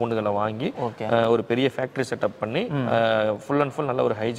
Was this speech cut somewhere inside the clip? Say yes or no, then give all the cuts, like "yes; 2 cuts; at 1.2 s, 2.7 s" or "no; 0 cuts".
no; 0 cuts